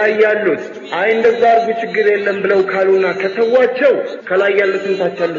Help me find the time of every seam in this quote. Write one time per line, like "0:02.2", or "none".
0:04.2